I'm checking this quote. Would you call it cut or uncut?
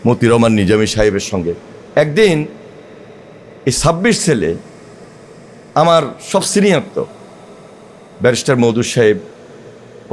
cut